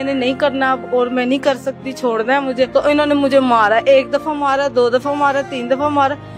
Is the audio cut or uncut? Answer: cut